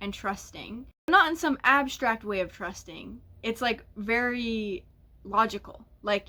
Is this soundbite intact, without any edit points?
no; 1 cut; at 1.1 s

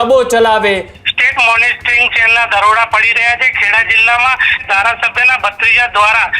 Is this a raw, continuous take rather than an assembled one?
no; 2 cuts; at 0.9 s, 4.6 s

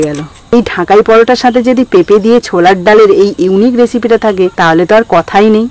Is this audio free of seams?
no; 1 cut; at 4.5 s

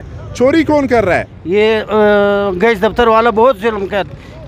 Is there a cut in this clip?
yes; 1 cut; at 1.3 s

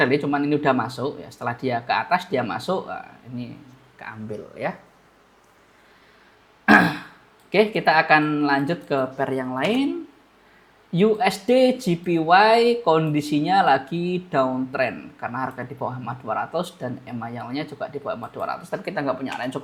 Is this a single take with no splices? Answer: yes; 0 cuts

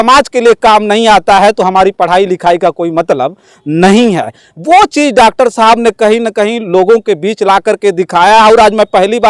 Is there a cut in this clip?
no; 0 cuts

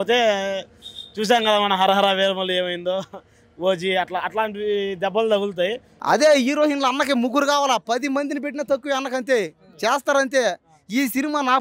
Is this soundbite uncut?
no; 1 cut; at 5.9 s

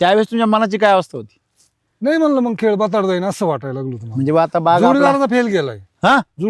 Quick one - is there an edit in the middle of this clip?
no; 0 cuts

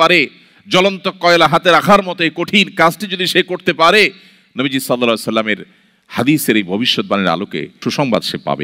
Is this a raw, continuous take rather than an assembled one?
no; 1 cut; at 7.7 s

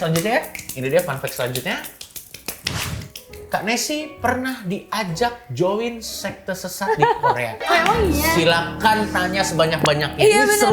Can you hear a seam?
no; 0 cuts

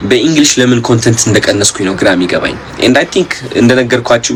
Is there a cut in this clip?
no; 0 cuts

